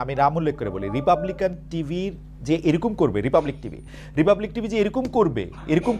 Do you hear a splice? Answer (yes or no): no